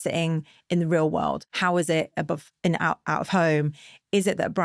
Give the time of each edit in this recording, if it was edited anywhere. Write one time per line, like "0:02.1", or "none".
0:01.5